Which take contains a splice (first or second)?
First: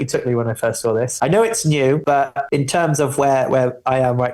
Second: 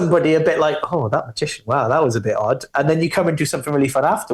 first